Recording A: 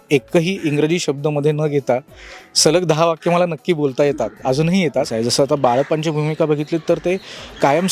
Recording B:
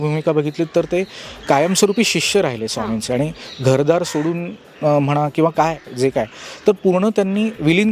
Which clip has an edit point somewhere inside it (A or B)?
A